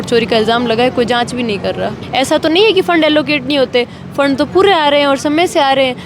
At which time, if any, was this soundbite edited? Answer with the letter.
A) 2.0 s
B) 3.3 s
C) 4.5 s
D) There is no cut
A